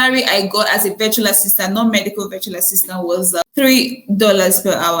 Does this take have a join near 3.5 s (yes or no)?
no